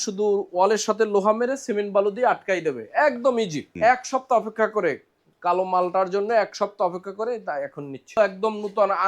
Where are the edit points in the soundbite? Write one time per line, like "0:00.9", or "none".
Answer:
0:03.6
0:08.2

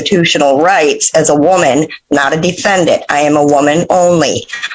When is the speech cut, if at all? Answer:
none

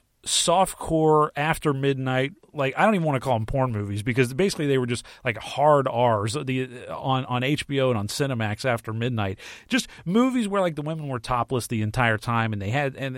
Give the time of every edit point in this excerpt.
0:02.5

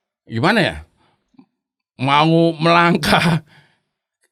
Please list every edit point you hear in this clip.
none

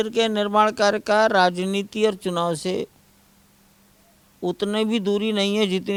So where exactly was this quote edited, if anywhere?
none

